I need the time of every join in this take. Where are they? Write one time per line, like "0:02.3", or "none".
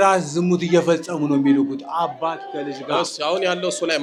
none